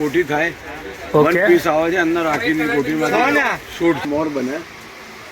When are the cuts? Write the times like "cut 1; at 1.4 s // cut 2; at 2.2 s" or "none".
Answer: cut 1; at 4.0 s